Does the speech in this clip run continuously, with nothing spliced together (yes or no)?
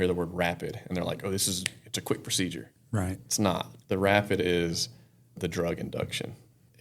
yes